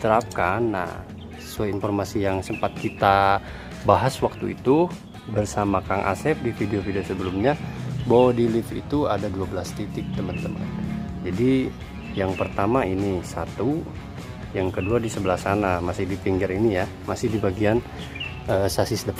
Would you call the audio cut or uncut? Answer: uncut